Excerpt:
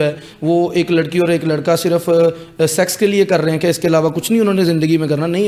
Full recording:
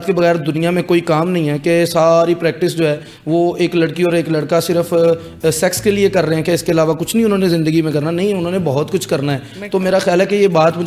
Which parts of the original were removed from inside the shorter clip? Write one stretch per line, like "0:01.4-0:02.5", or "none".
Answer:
none